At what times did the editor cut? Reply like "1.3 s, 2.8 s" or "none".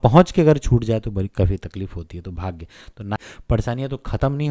3.2 s